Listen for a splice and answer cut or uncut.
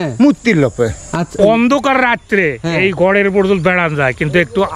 cut